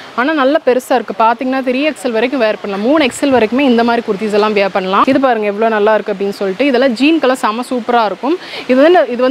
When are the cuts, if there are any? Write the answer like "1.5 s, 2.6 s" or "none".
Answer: 5.0 s